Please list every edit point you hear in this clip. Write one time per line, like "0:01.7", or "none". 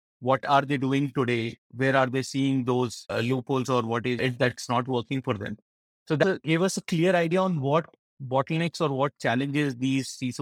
none